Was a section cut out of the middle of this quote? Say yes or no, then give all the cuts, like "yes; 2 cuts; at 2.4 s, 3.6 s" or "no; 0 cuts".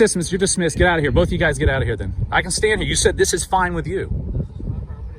no; 0 cuts